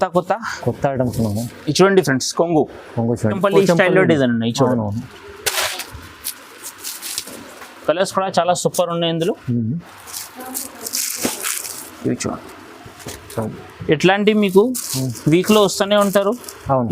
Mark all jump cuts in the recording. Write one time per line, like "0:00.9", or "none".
0:03.4